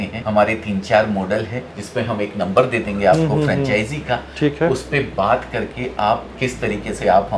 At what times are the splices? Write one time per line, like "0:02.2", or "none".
none